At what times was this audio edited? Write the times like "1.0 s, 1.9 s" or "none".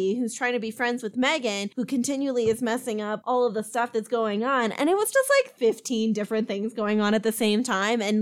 5.5 s